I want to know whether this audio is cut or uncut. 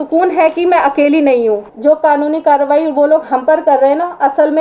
cut